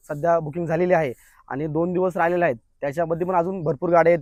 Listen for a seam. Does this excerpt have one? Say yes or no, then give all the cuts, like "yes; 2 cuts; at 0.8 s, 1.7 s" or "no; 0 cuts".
no; 0 cuts